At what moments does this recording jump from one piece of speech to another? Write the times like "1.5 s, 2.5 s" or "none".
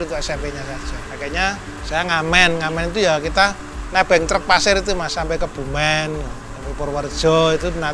1.0 s